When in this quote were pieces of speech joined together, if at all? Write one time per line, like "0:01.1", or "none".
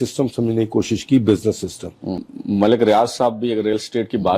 0:02.2